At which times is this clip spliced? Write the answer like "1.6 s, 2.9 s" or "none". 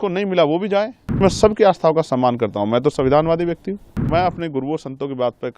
1.2 s, 4.0 s